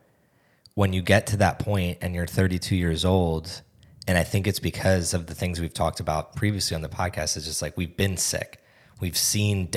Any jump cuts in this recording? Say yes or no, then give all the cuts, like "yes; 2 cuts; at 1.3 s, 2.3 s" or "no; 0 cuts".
no; 0 cuts